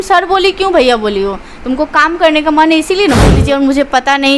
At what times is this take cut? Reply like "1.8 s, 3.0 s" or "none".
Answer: 3.3 s